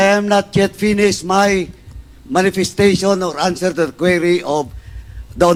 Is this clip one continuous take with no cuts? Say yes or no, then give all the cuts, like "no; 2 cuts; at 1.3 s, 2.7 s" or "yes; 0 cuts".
yes; 0 cuts